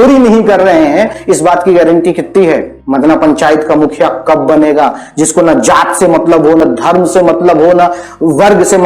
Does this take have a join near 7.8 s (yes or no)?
no